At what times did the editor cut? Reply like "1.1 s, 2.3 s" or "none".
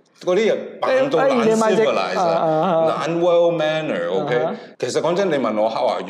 4.6 s